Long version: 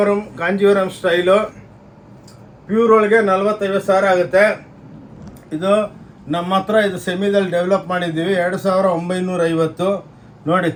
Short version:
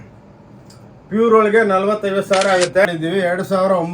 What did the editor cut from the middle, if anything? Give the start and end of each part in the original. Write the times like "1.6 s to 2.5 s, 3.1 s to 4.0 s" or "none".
4.4 s to 8.0 s